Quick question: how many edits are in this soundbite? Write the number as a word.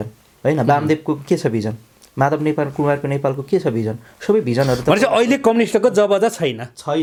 zero